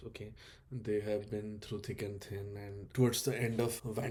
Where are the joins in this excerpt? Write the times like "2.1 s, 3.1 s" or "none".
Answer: none